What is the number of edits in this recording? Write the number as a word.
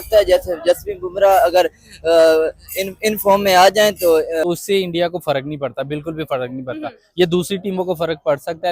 one